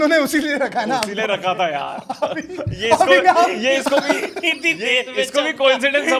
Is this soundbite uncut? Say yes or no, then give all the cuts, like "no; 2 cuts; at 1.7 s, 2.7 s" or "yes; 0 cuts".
yes; 0 cuts